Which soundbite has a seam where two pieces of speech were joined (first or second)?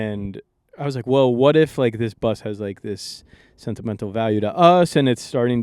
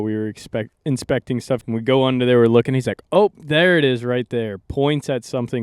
second